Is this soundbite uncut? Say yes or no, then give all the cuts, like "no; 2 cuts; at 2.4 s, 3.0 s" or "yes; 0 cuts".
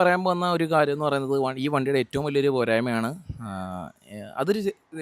yes; 0 cuts